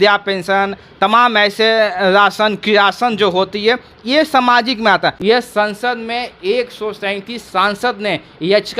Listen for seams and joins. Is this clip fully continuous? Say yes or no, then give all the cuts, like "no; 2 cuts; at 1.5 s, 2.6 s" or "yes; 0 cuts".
no; 1 cut; at 5.2 s